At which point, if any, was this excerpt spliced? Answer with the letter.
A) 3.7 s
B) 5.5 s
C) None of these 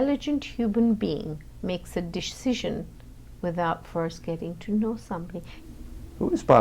B